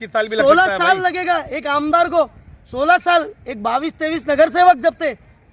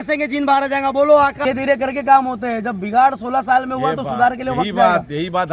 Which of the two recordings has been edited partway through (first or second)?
second